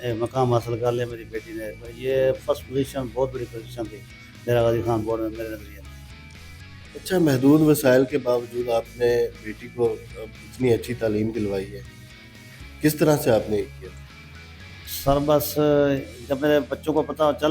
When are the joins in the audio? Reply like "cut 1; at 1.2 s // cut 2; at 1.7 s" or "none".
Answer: none